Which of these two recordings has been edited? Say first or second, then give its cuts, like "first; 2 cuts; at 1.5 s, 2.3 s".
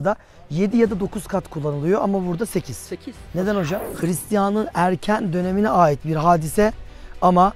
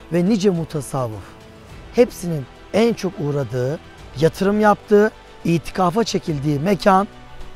first; 1 cut; at 3.9 s